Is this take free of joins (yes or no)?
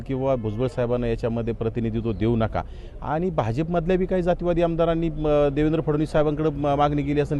yes